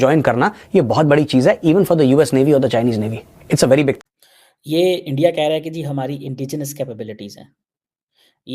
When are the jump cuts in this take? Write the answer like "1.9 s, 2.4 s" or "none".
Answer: 4.0 s